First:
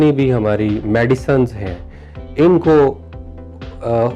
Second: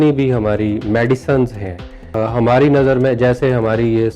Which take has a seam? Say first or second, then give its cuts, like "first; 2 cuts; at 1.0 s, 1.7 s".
second; 1 cut; at 2.1 s